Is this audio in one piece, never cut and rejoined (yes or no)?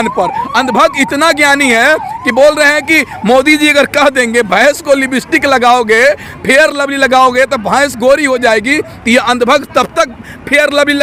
yes